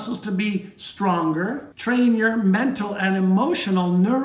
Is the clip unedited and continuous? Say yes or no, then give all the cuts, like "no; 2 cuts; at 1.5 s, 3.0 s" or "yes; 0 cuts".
no; 1 cut; at 1.7 s